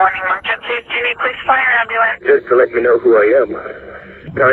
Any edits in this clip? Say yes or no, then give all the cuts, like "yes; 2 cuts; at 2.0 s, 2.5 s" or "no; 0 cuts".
no; 0 cuts